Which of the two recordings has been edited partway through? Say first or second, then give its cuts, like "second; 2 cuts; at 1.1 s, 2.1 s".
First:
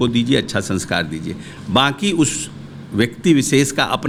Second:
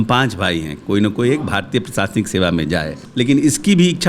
second; 1 cut; at 3.0 s